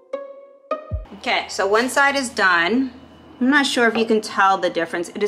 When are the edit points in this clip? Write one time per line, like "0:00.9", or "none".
0:01.0